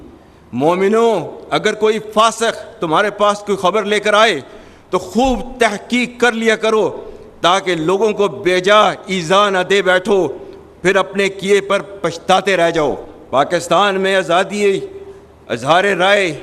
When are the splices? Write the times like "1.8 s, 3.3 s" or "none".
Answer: 13.1 s